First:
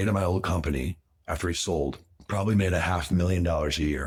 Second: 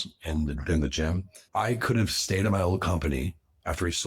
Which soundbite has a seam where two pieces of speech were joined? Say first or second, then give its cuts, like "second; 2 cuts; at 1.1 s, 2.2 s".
second; 1 cut; at 1.3 s